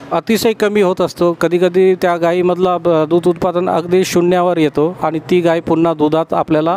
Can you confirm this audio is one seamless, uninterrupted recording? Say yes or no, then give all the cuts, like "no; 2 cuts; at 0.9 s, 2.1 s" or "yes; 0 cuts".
yes; 0 cuts